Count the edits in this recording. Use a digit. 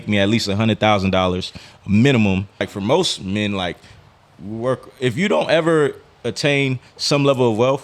1